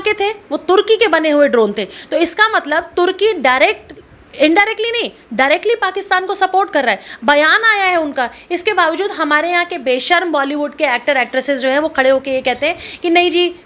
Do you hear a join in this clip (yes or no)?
no